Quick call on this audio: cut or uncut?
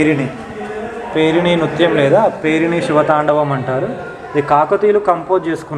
uncut